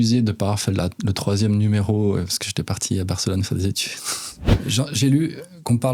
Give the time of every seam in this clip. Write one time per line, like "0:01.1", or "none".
0:04.5